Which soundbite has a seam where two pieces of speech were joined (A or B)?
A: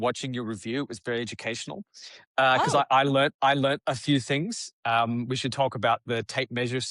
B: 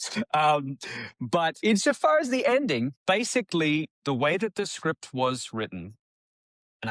B